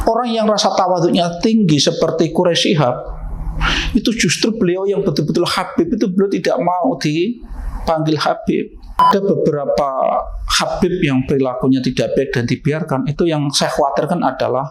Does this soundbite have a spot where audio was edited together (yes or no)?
yes